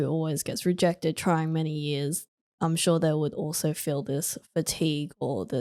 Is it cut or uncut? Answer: uncut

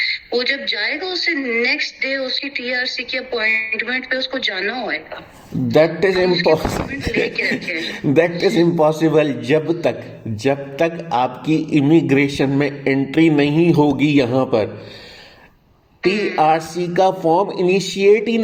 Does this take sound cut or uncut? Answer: uncut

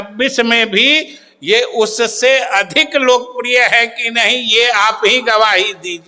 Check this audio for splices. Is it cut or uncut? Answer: uncut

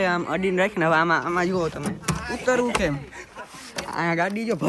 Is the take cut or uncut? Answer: uncut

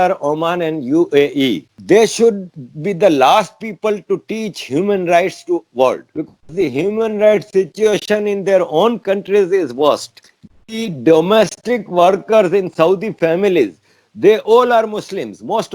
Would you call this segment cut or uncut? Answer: cut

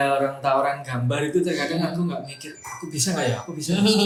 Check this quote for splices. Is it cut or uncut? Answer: uncut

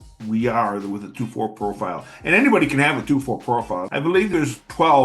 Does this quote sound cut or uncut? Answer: cut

